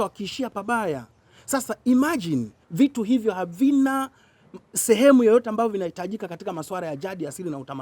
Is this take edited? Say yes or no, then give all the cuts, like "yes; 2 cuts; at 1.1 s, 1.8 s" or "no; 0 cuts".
yes; 1 cut; at 2.6 s